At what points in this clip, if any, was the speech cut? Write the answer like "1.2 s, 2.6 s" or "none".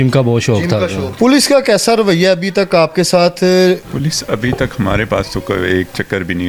1.0 s, 3.9 s